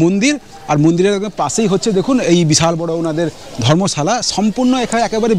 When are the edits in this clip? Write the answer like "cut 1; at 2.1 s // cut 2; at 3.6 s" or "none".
none